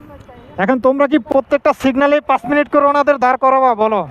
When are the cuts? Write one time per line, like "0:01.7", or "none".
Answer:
0:01.3